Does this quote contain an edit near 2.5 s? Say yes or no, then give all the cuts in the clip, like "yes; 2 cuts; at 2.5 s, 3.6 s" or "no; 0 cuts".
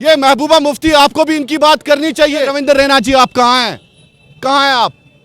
yes; 1 cut; at 2.5 s